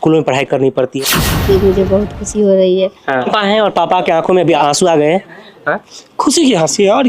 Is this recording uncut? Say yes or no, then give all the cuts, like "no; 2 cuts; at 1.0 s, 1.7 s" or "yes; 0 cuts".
no; 3 cuts; at 0.9 s, 3.3 s, 4.6 s